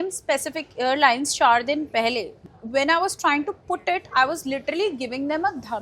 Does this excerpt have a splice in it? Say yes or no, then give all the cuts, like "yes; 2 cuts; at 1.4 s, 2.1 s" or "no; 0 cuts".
yes; 1 cut; at 2.5 s